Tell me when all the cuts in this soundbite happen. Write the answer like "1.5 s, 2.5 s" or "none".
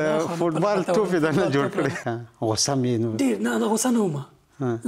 2.0 s